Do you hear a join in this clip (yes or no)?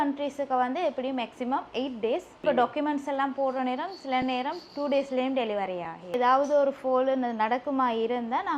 yes